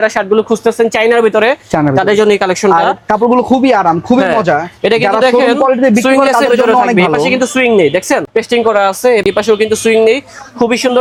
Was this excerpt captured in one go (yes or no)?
yes